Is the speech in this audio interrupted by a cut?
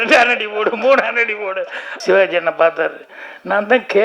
yes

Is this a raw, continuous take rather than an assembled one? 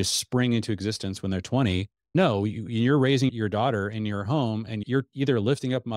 no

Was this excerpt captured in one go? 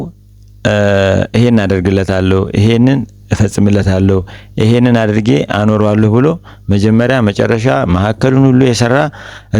yes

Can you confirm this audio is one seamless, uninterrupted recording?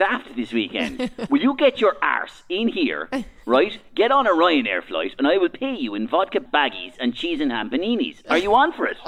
no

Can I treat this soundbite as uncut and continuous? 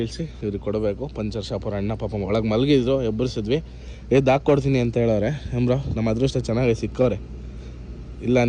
yes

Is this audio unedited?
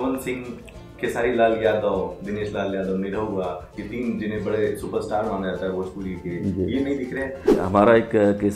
no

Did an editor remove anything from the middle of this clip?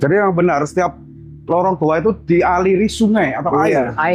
no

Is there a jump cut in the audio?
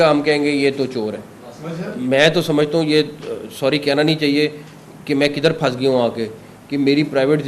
yes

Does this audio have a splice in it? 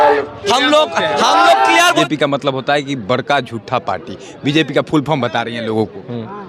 yes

